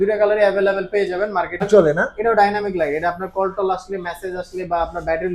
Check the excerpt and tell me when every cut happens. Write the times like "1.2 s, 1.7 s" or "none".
1.6 s